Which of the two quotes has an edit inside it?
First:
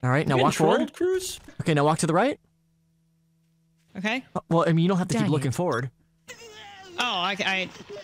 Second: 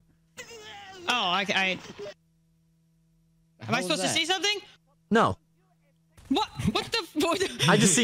first; 1 cut; at 1.5 s

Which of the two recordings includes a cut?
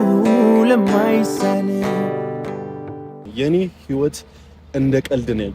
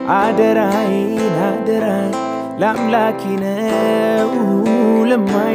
first; 1 cut; at 3.2 s

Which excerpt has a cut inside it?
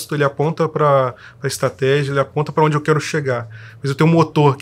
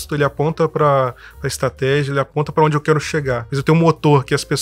second; 1 cut; at 3.5 s

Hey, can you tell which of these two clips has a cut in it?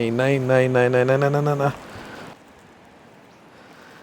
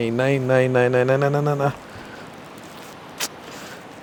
first; 1 cut; at 2.3 s

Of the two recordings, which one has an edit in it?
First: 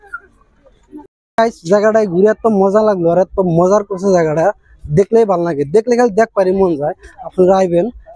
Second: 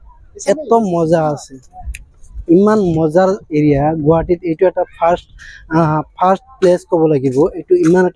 first; 1 cut; at 1.2 s

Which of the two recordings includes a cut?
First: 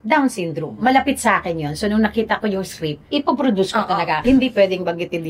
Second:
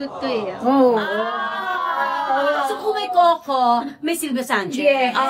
first; 3 cuts; at 0.8 s, 3.0 s, 4.1 s

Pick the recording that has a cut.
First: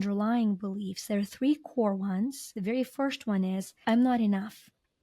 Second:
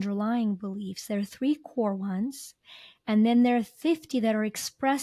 first; 2 cuts; at 2.5 s, 3.7 s

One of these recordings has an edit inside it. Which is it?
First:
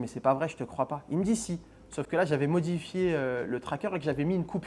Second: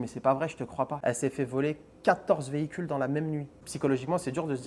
second; 2 cuts; at 0.9 s, 3.6 s

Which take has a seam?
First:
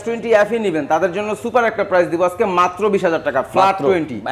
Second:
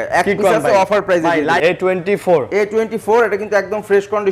second; 1 cut; at 1.6 s

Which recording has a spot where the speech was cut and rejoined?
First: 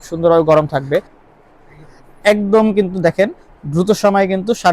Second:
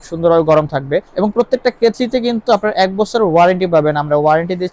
first; 1 cut; at 1.1 s

